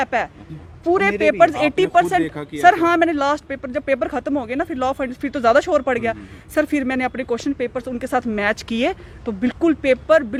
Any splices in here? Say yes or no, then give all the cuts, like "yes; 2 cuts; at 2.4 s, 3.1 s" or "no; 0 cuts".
no; 0 cuts